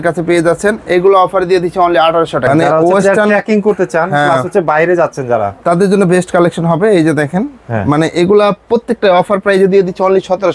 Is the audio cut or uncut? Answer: cut